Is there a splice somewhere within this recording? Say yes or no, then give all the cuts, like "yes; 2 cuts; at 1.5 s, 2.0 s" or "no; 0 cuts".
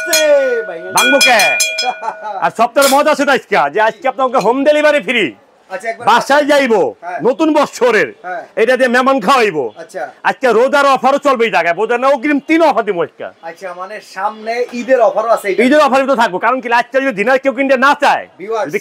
no; 0 cuts